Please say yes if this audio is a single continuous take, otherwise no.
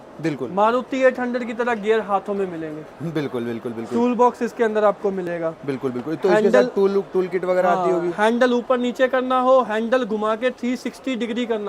yes